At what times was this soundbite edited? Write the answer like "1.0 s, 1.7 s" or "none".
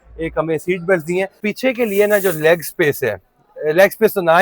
1.4 s